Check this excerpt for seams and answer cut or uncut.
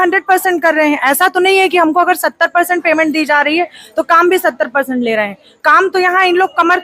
uncut